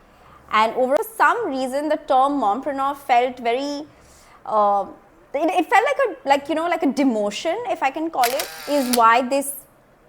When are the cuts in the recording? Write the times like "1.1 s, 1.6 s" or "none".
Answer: 1.0 s, 8.5 s